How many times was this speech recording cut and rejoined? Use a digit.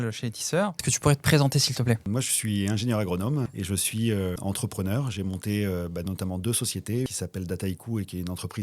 5